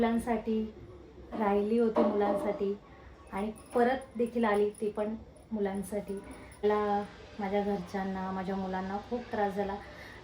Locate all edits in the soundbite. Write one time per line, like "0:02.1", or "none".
0:06.6